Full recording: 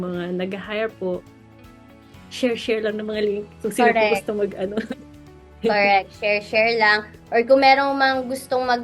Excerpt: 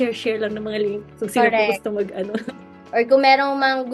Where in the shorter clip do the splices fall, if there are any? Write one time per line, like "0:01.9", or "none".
0:02.7